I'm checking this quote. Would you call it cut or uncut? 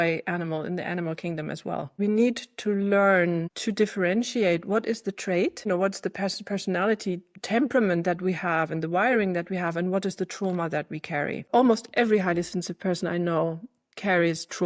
cut